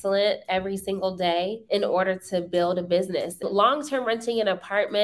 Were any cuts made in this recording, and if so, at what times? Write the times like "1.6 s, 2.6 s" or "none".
1.6 s, 3.4 s